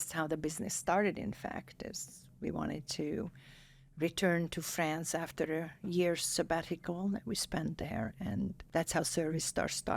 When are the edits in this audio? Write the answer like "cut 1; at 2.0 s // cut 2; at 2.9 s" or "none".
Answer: cut 1; at 8.6 s